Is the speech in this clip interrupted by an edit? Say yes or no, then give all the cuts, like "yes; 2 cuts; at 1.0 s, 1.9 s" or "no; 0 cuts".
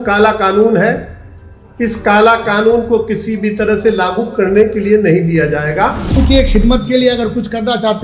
yes; 1 cut; at 6.2 s